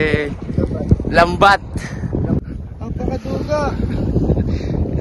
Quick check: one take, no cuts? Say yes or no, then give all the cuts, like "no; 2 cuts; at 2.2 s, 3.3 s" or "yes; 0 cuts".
no; 1 cut; at 2.5 s